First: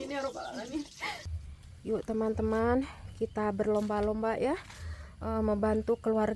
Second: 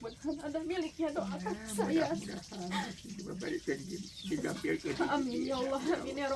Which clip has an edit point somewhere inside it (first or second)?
first